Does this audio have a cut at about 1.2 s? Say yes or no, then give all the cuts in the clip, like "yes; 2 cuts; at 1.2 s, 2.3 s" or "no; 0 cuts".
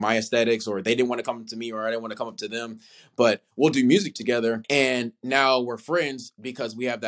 no; 1 cut; at 4.6 s